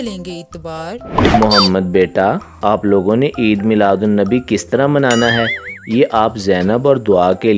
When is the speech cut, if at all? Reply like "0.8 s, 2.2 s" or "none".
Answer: none